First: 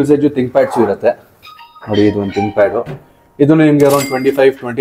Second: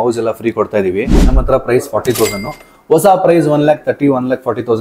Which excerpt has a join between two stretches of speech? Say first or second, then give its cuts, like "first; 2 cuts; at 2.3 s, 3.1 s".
second; 1 cut; at 1.3 s